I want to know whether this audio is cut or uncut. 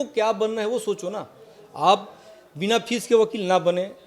uncut